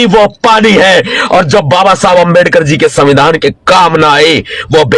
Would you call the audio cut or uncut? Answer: uncut